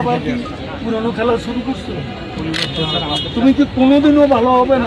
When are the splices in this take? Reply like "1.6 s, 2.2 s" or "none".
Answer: none